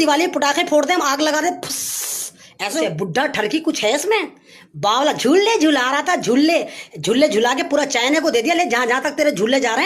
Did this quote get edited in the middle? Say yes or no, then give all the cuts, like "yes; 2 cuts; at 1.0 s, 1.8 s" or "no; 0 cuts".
yes; 1 cut; at 2.8 s